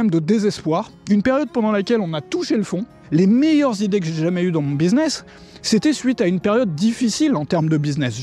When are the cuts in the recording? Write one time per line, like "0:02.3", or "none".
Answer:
0:03.0